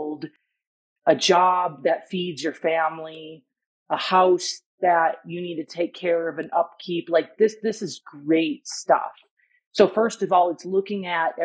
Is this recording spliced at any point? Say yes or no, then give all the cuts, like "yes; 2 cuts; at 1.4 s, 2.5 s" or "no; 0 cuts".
no; 0 cuts